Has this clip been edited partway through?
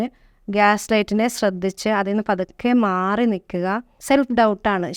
yes; 1 cut; at 3.9 s

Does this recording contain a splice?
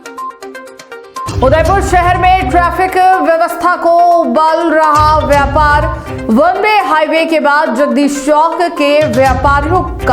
yes; 1 cut; at 1.3 s

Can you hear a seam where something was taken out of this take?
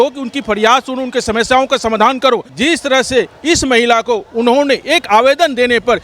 yes; 1 cut; at 2.5 s

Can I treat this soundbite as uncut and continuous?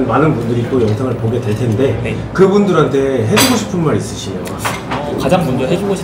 yes; 0 cuts

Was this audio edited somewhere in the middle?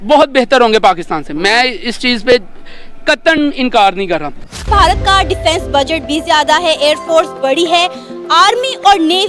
yes; 1 cut; at 4.4 s

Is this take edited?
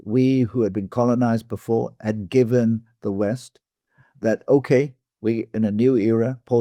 no; 0 cuts

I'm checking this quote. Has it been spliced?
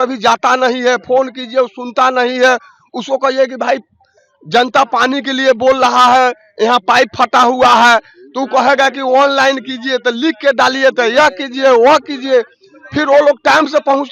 no; 0 cuts

